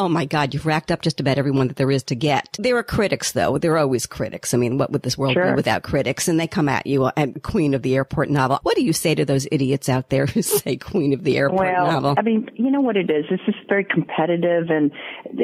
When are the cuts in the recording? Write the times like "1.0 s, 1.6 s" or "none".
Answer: 2.5 s, 7.4 s, 8.6 s, 12.1 s